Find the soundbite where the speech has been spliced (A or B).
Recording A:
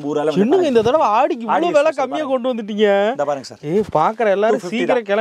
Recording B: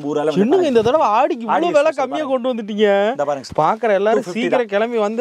B